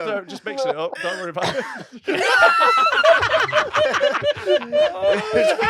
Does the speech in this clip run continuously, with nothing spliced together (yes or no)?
no